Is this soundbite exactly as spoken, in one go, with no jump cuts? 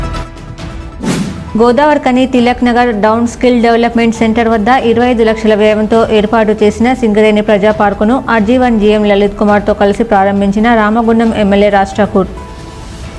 no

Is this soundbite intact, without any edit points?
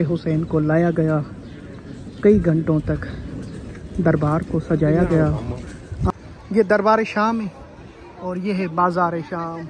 no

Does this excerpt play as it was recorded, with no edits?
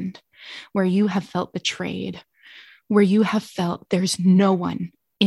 yes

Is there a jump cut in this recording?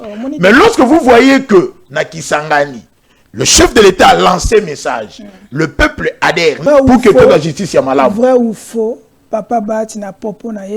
yes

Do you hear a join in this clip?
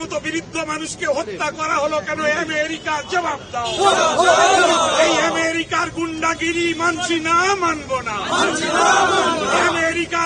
no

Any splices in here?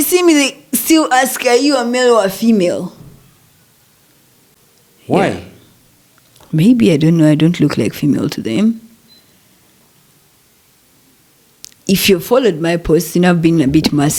no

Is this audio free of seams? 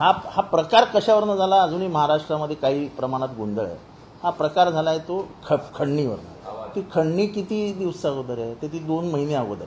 yes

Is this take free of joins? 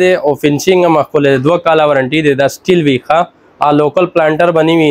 yes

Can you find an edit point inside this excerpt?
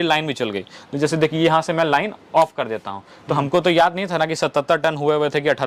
no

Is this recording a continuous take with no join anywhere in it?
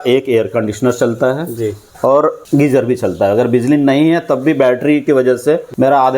no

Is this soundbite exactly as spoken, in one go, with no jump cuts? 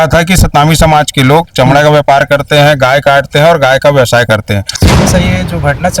no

